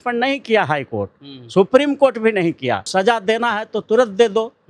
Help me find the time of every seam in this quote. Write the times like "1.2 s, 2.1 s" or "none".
2.9 s

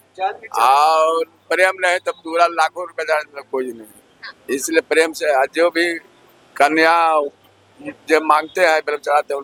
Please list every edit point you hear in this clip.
none

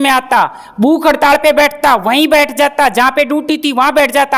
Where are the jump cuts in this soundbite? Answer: none

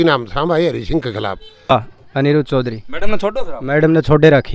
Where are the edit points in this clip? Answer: 1.7 s

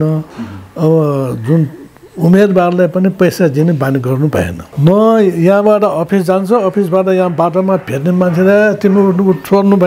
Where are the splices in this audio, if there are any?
4.6 s

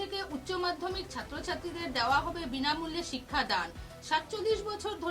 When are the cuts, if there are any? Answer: none

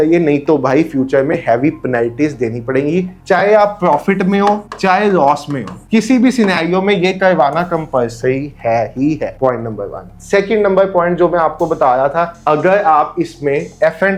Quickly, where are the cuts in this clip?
none

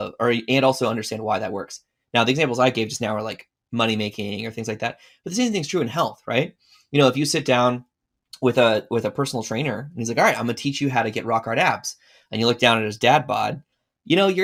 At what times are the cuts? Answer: none

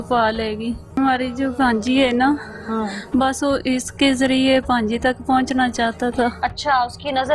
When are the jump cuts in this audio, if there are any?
1.0 s

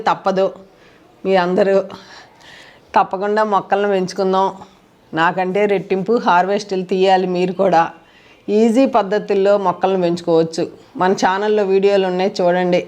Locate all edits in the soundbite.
none

